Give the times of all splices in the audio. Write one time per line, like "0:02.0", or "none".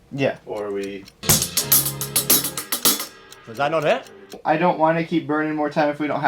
0:01.1
0:04.4